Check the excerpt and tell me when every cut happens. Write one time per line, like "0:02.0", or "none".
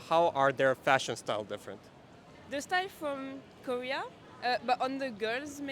0:04.2